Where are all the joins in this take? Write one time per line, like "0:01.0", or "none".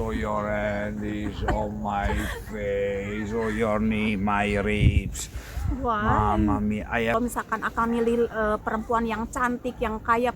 0:07.1

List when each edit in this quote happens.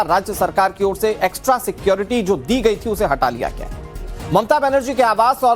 none

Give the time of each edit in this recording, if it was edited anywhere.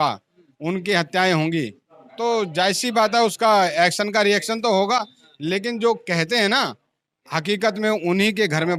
none

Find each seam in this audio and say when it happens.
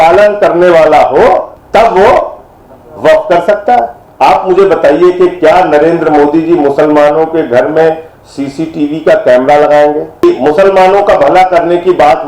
0:01.6
0:04.0
0:10.2

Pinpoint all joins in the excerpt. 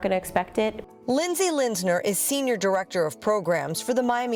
none

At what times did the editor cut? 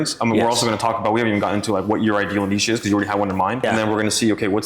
0:03.6

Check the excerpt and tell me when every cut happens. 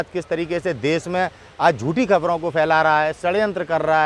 none

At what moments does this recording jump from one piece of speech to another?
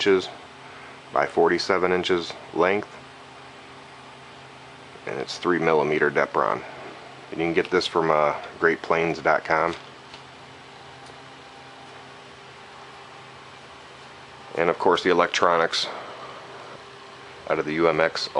none

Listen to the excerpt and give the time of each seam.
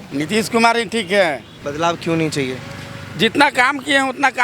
0:01.5

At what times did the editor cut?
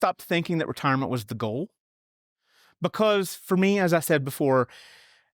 none

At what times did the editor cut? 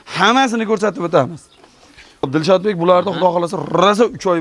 0:02.3

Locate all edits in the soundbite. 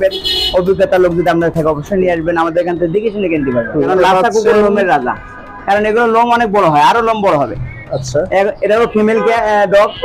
0:03.9

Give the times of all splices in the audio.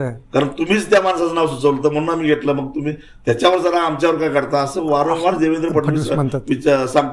none

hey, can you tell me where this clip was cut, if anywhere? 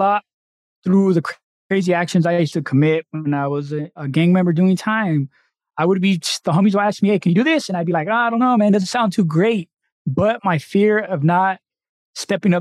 none

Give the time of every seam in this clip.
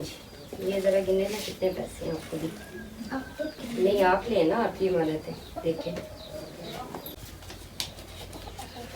0:07.1

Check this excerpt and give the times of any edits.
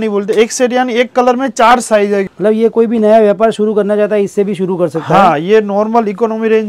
0:02.3

